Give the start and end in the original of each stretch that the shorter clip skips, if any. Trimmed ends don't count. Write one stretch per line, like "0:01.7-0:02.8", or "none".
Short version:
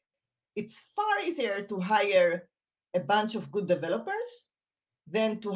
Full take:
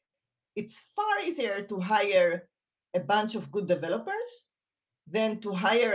none